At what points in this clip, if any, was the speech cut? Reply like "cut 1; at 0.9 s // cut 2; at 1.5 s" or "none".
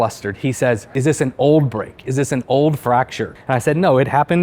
cut 1; at 1.0 s // cut 2; at 3.3 s